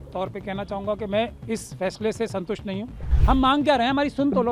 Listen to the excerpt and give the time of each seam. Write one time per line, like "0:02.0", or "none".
0:03.1